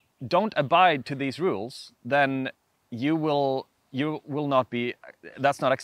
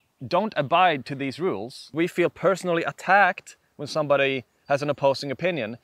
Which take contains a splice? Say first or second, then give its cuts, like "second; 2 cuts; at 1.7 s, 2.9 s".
second; 1 cut; at 1.9 s